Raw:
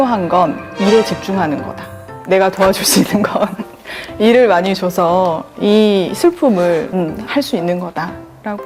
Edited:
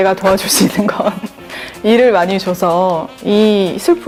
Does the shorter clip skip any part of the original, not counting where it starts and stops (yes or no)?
no